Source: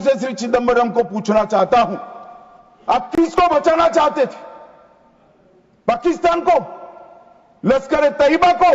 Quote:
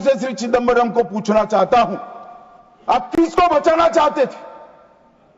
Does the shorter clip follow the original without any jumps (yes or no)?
yes